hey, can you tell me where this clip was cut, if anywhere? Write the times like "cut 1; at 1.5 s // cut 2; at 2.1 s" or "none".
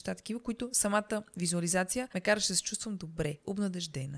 cut 1; at 2.1 s